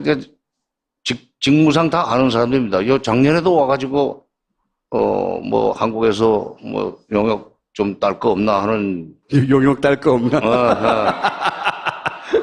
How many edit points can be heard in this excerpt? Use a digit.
0